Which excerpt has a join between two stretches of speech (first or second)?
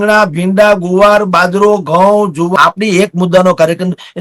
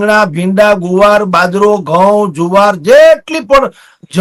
first